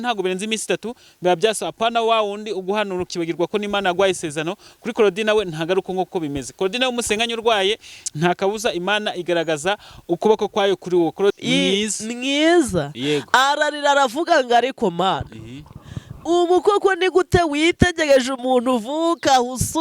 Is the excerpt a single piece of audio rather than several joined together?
no; 1 cut; at 11.4 s

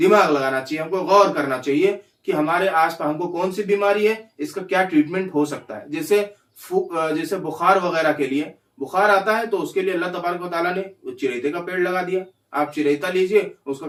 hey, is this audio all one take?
yes; 0 cuts

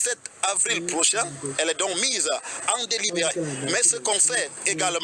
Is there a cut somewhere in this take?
no; 0 cuts

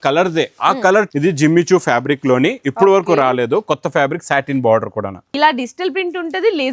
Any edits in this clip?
yes; 2 cuts; at 1.1 s, 5.2 s

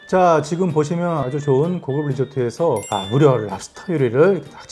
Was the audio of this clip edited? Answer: yes; 1 cut; at 1.3 s

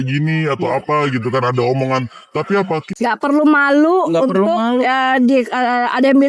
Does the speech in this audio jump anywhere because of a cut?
yes; 1 cut; at 2.9 s

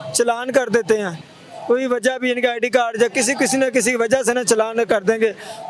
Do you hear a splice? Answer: no; 0 cuts

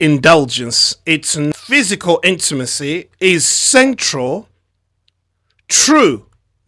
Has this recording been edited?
yes; 1 cut; at 1.5 s

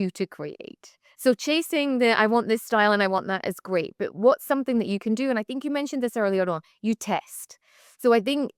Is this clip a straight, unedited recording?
yes; 0 cuts

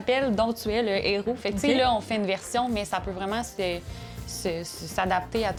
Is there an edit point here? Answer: no; 0 cuts

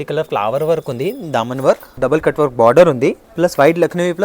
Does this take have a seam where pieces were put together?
yes; 2 cuts; at 2.0 s, 3.3 s

